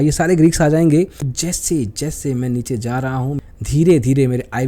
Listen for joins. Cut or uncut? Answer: cut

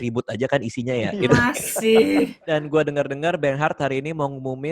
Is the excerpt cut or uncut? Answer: cut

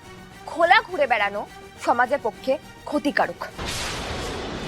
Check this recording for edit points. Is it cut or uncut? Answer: cut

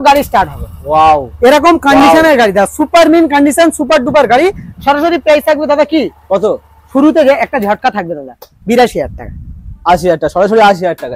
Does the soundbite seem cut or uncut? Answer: uncut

